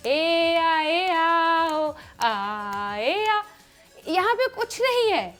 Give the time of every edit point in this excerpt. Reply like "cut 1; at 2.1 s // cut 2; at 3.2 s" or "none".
none